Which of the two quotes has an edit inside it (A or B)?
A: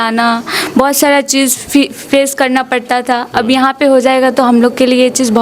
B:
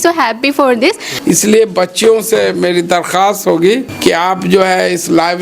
B